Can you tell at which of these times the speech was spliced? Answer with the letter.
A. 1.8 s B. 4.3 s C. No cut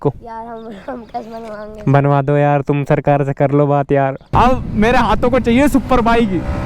B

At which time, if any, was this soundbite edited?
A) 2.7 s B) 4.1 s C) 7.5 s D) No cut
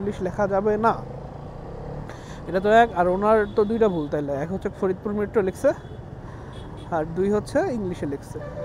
D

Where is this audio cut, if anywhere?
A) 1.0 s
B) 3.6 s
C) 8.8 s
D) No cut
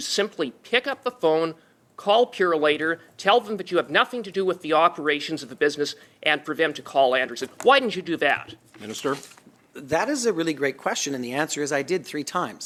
D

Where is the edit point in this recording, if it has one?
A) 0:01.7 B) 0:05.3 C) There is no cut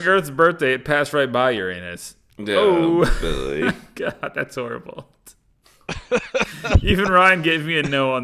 C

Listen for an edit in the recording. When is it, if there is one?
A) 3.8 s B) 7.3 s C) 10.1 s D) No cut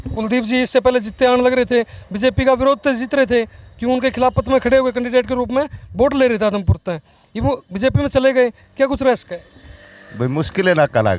D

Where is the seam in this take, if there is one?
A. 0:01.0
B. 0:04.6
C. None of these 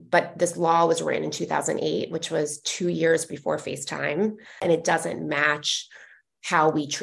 B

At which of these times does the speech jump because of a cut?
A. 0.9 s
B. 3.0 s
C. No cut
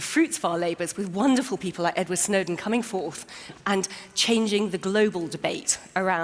A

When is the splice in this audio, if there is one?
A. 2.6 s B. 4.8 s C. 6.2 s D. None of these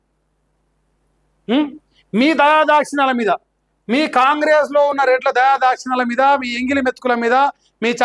D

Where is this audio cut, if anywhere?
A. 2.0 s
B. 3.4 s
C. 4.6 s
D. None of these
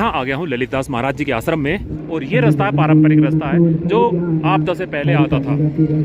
A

